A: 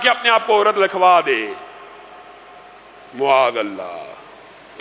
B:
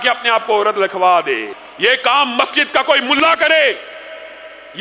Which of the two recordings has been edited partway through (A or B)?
B